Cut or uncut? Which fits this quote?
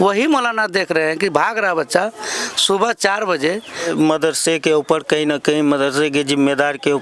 cut